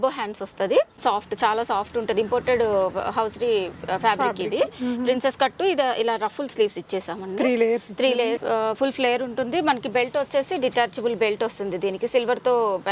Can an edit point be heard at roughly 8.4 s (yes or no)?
yes